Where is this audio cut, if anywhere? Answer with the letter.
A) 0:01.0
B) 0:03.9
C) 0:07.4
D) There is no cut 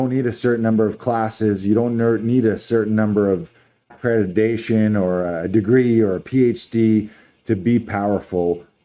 B